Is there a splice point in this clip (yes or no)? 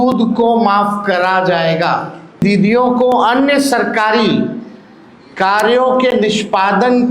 yes